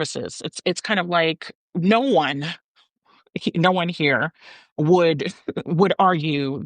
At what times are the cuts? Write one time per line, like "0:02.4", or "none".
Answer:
0:01.5